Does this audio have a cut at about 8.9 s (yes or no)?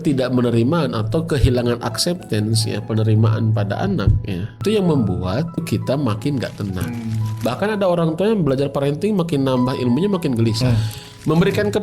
no